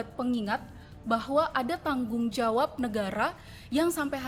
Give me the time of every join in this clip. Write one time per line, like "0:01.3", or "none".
none